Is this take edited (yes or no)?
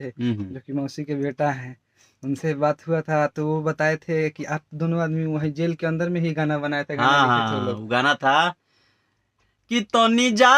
no